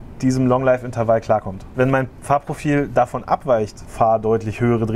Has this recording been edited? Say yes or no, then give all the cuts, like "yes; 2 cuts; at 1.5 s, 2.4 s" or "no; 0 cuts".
yes; 2 cuts; at 1.7 s, 3.9 s